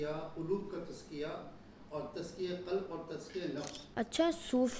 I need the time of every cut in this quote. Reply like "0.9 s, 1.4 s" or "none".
3.8 s